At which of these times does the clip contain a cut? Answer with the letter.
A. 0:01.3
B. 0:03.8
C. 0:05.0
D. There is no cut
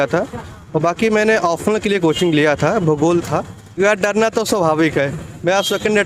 B